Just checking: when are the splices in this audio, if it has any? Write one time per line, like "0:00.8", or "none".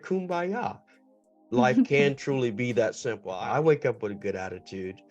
0:03.3